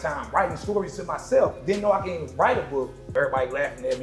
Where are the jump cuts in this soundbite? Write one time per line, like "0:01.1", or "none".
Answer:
0:03.1